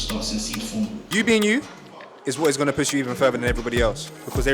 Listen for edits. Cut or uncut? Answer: cut